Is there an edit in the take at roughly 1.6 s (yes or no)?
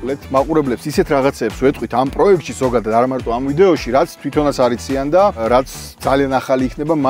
no